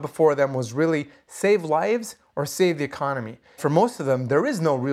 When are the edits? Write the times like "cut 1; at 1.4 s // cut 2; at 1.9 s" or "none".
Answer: cut 1; at 3.6 s

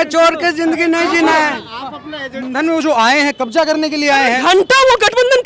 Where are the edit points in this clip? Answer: cut 1; at 2.4 s

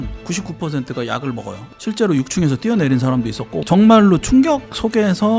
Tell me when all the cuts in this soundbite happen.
cut 1; at 1.7 s

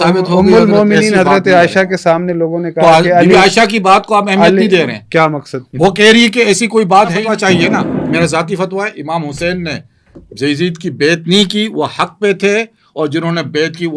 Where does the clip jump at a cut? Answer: cut 1; at 7.3 s

